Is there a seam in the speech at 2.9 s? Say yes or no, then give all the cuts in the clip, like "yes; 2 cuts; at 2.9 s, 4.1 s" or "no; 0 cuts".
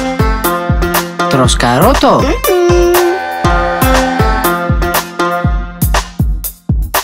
no; 0 cuts